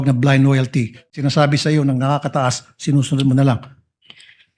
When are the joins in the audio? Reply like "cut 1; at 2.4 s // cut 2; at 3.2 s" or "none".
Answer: cut 1; at 1.1 s